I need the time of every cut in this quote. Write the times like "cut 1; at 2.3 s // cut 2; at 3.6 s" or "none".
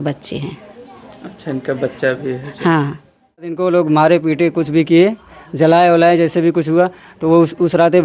cut 1; at 3.6 s